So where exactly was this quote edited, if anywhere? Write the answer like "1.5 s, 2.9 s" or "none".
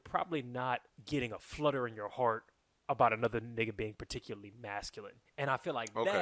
0.9 s, 5.2 s